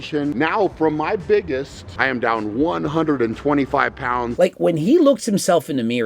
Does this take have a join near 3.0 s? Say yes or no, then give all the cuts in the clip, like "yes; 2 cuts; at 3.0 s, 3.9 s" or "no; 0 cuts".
no; 2 cuts; at 1.8 s, 4.3 s